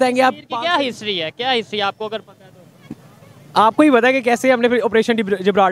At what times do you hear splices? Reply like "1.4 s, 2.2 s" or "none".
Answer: none